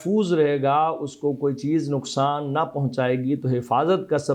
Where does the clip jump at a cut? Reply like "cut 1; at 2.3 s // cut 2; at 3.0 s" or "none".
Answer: none